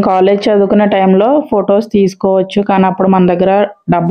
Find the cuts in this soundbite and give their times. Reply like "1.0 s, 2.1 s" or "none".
none

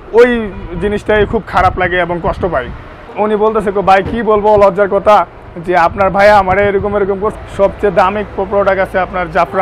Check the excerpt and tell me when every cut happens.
3.0 s, 7.3 s

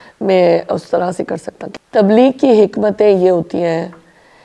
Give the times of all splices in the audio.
1.6 s

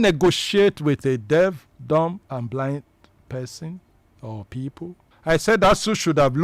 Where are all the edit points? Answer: 1.7 s, 5.1 s

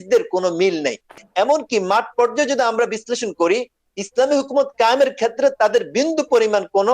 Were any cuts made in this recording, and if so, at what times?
1.1 s

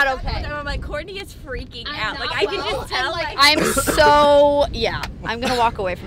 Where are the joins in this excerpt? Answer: none

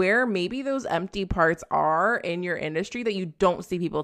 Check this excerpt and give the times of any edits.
none

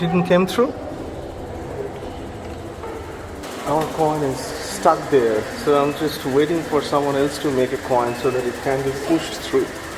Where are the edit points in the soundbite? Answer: 2.8 s

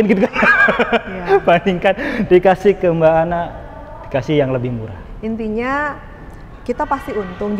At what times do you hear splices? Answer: none

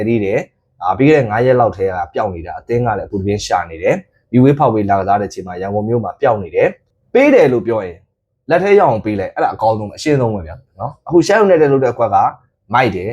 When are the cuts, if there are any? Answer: 6.9 s

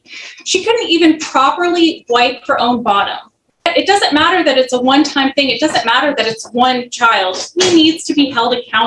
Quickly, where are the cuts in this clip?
3.7 s

